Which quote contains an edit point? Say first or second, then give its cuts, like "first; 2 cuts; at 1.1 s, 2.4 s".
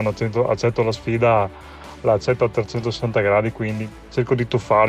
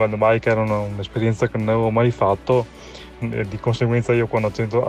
first; 1 cut; at 3.9 s